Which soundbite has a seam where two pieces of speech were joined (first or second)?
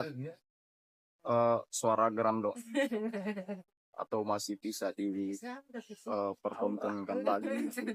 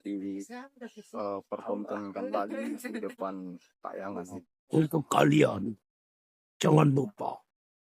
second